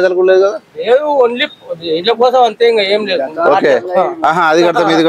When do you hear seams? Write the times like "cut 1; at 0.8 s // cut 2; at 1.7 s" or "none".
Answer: none